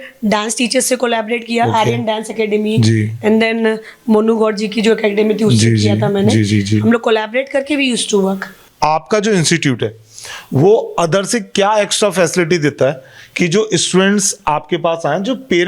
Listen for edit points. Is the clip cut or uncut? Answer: cut